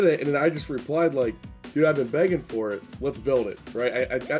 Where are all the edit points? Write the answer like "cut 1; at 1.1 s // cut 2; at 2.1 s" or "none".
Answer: cut 1; at 2.8 s